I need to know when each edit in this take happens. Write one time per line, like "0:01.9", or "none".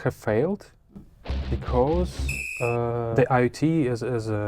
0:03.1